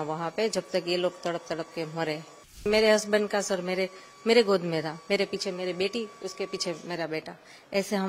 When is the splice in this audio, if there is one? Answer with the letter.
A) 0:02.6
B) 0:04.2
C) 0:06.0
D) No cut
A